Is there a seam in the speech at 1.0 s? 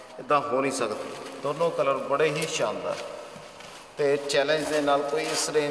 yes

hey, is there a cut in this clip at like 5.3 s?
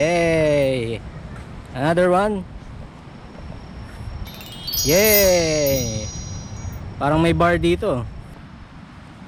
no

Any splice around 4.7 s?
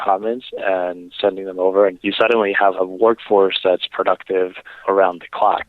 yes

